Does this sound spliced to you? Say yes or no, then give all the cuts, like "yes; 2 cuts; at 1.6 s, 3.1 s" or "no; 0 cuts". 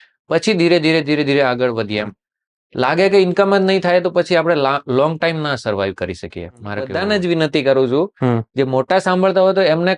yes; 1 cut; at 6.9 s